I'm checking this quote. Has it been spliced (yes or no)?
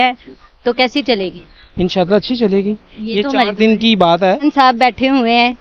yes